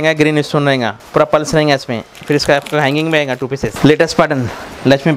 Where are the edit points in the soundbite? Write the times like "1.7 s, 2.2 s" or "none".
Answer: 1.0 s, 3.7 s